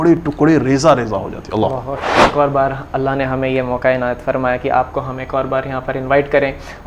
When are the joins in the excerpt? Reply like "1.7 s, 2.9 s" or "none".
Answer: 2.3 s